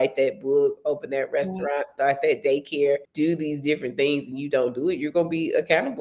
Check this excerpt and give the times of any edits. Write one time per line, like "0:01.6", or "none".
0:03.1